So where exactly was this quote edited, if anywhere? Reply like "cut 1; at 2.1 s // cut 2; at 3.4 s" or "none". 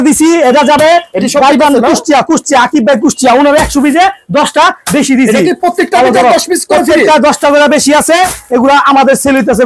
none